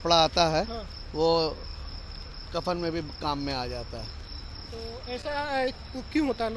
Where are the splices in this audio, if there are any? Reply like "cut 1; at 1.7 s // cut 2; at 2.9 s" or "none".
none